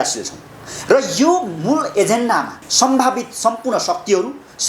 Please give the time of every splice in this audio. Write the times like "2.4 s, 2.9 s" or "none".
2.7 s